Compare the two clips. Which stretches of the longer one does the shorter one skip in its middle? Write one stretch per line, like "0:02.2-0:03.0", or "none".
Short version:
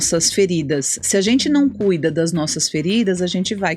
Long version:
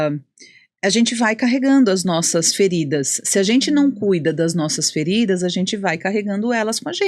none